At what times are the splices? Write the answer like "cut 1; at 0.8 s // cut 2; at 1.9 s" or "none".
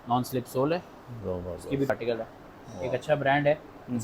cut 1; at 1.9 s